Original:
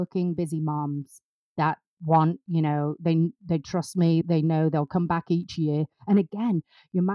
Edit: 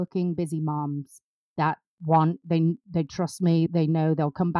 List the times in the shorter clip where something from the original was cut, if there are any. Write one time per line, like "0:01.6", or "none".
0:02.4

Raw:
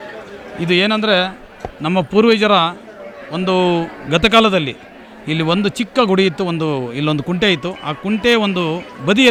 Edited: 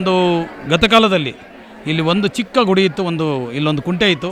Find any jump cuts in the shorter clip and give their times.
none

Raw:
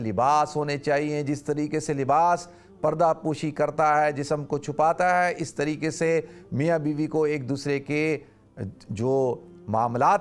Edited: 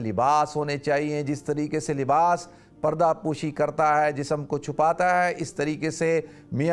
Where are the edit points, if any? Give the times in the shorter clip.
none

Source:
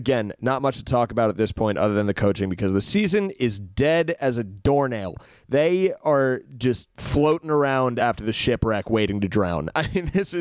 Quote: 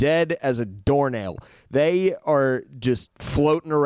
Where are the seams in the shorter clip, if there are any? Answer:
none

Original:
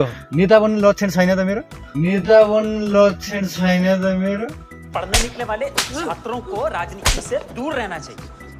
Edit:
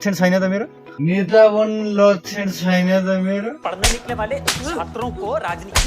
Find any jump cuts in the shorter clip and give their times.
0:03.6

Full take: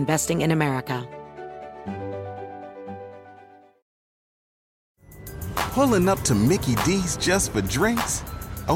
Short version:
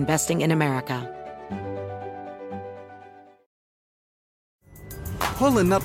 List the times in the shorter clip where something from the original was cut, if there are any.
0:01.0

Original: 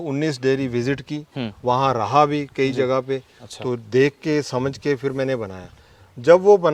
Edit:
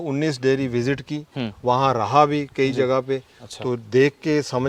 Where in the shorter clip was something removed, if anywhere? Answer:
none

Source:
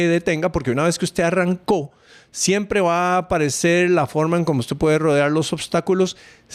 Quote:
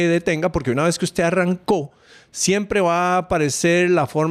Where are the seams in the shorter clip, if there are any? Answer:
none

